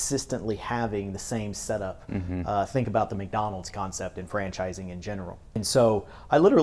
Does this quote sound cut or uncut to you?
cut